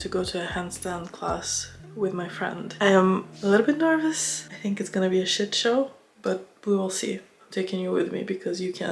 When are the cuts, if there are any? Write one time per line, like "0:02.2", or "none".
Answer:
none